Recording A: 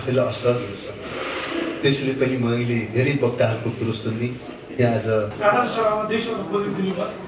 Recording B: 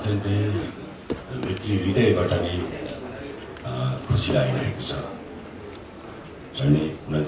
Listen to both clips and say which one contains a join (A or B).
A